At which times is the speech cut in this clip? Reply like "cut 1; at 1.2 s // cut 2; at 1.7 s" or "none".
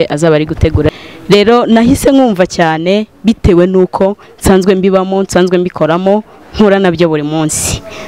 cut 1; at 0.9 s